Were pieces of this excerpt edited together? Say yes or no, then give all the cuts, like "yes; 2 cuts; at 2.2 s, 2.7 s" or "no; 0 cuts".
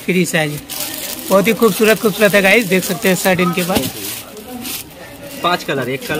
no; 0 cuts